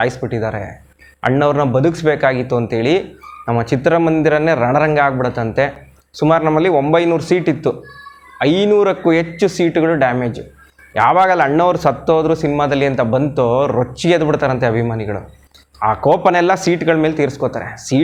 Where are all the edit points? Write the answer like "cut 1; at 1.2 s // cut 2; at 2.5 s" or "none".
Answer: none